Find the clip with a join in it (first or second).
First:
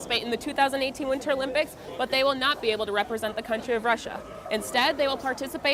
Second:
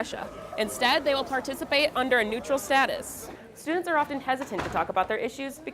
second